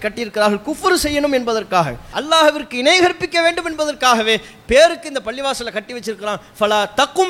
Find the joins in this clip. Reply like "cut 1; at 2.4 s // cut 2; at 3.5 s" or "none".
cut 1; at 2.2 s